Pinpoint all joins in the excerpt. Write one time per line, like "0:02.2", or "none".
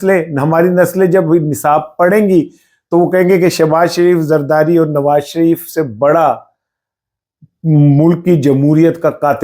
none